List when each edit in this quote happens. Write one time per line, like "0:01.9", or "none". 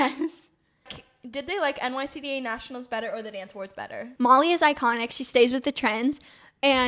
0:01.0
0:04.0